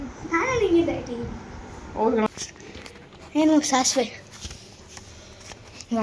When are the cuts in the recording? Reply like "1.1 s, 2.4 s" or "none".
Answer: 2.3 s